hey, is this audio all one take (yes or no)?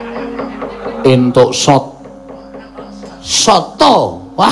yes